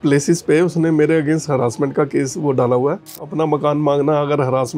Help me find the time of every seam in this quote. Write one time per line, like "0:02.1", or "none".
0:03.2